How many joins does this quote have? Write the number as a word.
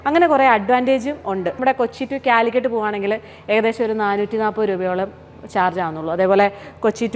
one